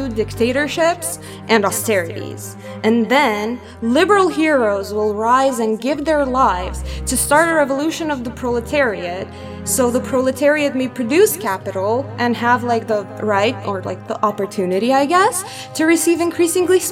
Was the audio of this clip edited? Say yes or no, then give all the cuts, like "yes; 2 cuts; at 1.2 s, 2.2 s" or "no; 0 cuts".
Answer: no; 0 cuts